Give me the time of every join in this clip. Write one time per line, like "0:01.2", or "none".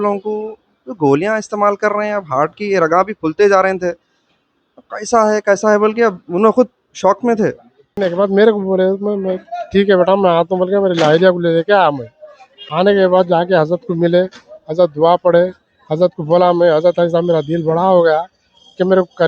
0:07.9